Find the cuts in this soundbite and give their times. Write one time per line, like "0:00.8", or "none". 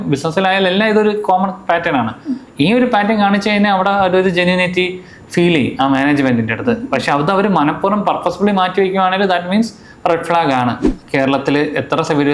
0:10.9

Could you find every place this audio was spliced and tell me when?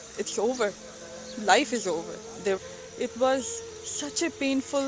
0:02.6

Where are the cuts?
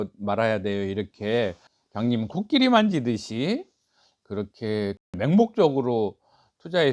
none

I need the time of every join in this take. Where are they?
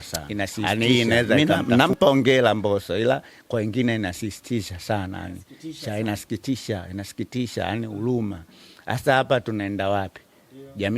0:01.3

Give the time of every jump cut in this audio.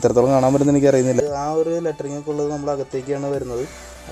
0:01.2

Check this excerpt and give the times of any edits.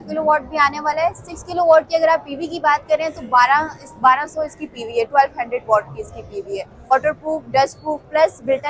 0:06.9

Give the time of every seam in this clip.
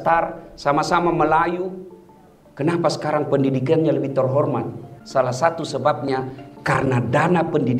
0:04.9

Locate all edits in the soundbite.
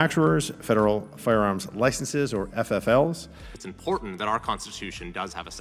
0:03.6

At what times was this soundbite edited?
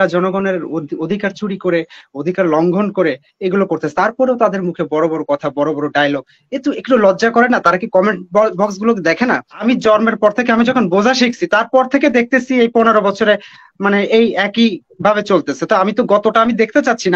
0:09.5

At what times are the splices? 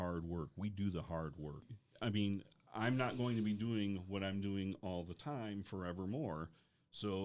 0:01.8

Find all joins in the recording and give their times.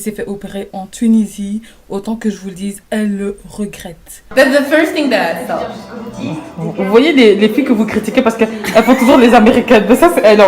0:04.2

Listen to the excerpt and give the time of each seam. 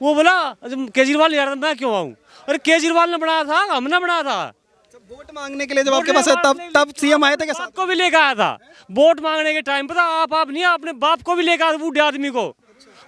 none

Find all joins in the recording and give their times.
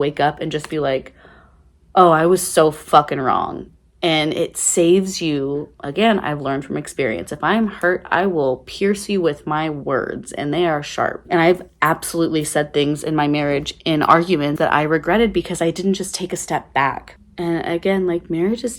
0:14.5
0:17.1

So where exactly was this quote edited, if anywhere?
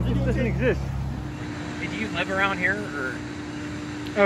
0:01.3

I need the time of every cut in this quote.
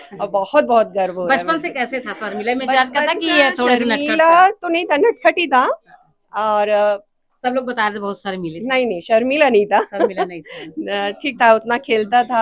none

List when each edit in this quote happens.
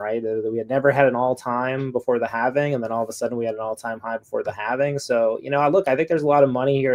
none

